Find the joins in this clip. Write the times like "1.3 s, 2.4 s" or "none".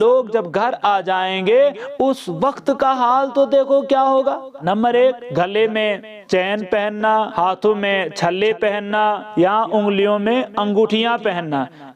4.5 s, 5.2 s, 7.3 s, 9.2 s